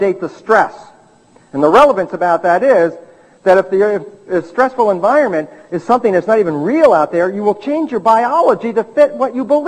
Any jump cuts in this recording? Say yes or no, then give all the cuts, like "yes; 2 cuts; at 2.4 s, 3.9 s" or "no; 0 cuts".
yes; 1 cut; at 4.4 s